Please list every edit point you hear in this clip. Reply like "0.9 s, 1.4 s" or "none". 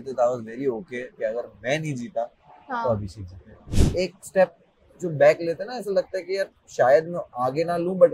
3.7 s